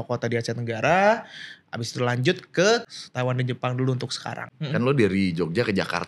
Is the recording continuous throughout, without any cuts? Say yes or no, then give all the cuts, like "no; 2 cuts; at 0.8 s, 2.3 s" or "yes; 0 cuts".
no; 2 cuts; at 2.9 s, 4.5 s